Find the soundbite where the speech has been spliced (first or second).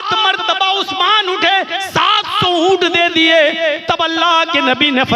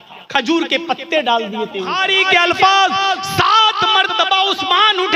second